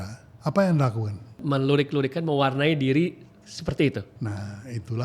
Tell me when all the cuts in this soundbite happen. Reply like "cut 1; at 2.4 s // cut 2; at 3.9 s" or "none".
cut 1; at 1.4 s // cut 2; at 4.1 s